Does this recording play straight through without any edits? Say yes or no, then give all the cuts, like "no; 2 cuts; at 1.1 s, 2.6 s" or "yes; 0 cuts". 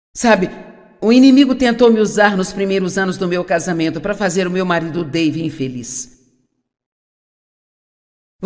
no; 1 cut; at 4.9 s